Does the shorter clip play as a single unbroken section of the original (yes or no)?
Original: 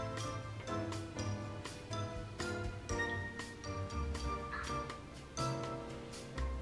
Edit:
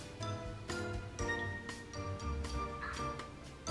yes